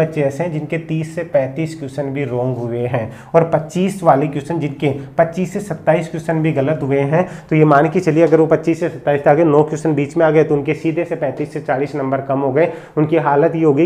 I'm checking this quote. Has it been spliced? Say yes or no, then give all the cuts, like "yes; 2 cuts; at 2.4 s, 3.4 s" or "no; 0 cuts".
no; 0 cuts